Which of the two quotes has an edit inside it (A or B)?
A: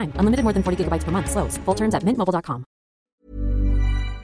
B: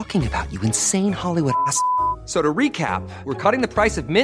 A